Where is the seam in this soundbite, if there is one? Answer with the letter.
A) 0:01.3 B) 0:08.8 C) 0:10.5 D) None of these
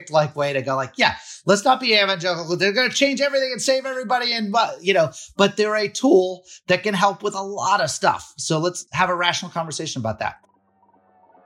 C